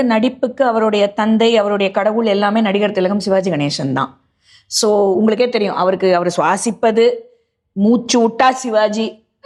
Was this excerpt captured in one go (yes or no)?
yes